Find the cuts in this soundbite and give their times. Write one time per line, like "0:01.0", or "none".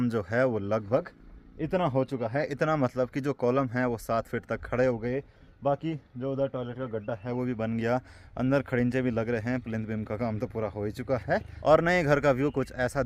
none